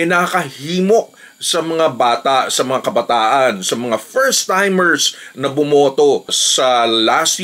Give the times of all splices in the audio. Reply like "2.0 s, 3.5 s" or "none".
none